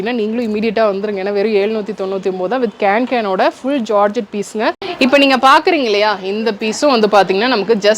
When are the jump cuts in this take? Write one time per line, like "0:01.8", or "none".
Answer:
0:04.8